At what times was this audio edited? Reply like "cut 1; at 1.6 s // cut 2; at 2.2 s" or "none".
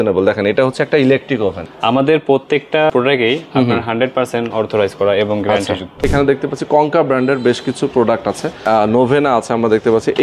cut 1; at 1.7 s // cut 2; at 2.9 s // cut 3; at 6.1 s // cut 4; at 8.5 s

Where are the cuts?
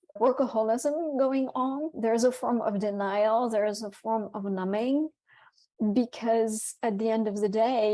cut 1; at 1.9 s

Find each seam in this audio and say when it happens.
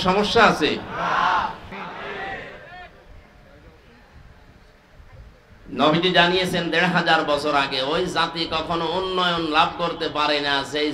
cut 1; at 1.7 s

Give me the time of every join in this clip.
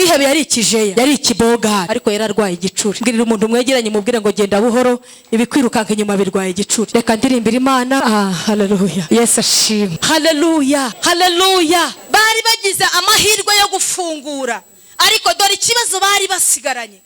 cut 1; at 0.9 s // cut 2; at 1.9 s // cut 3; at 3.0 s // cut 4; at 6.9 s // cut 5; at 8.0 s // cut 6; at 9.0 s // cut 7; at 10.0 s // cut 8; at 10.9 s // cut 9; at 12.0 s

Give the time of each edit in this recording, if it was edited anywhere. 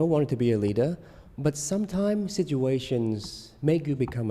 none

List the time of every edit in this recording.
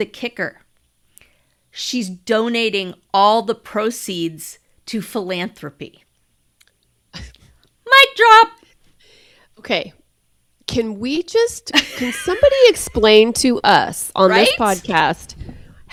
none

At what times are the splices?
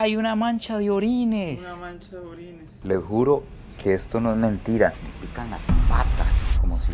cut 1; at 2.8 s

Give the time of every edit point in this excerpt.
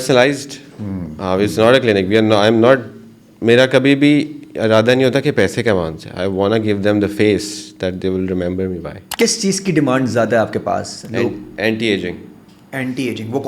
cut 1; at 9.0 s

